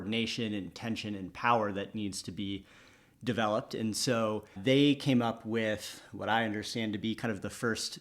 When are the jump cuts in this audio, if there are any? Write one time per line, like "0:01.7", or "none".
0:04.5